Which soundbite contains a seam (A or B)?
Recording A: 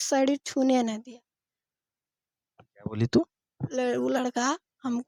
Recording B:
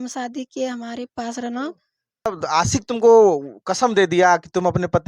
B